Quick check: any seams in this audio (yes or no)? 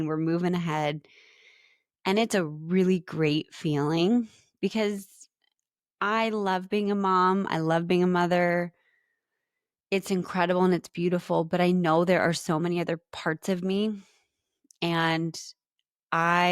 no